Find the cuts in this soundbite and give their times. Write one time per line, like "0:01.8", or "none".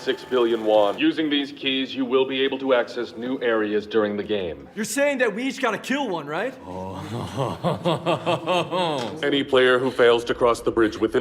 0:01.0
0:06.6
0:09.1